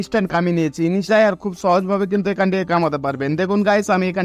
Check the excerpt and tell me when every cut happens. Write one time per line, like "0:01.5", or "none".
0:01.1

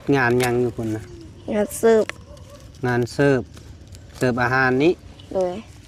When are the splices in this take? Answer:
none

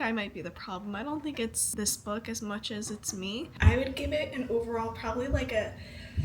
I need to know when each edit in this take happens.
0:01.6
0:03.5

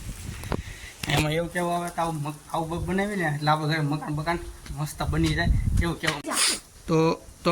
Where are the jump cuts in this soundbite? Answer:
0:06.2

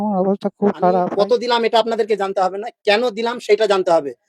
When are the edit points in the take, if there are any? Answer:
0:01.1

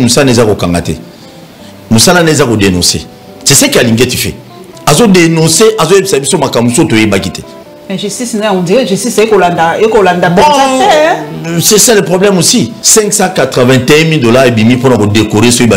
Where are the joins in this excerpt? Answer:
0:12.8

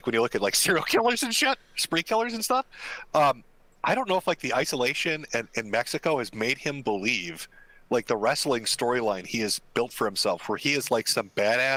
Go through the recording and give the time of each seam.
none

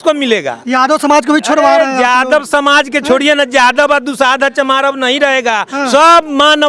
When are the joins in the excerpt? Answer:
none

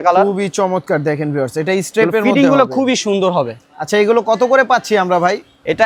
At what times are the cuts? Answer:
none

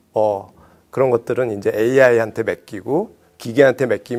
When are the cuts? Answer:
none

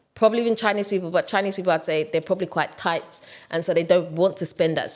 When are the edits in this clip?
none

